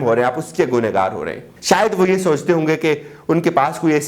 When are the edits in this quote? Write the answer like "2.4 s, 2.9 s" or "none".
1.5 s